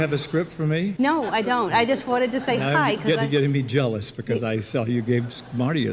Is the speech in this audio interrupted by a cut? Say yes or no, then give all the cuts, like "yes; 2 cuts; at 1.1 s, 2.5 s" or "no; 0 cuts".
no; 0 cuts